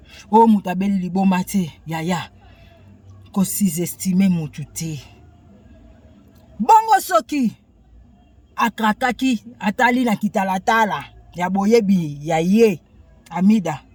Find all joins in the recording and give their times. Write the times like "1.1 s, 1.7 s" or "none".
none